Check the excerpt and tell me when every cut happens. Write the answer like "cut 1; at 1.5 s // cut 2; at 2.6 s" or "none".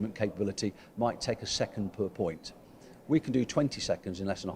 none